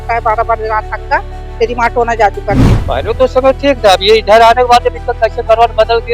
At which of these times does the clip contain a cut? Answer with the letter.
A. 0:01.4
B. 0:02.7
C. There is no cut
B